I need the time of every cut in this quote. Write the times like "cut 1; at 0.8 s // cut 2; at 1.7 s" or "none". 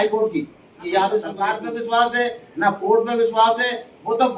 cut 1; at 1.5 s